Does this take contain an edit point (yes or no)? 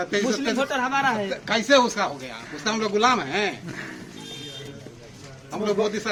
no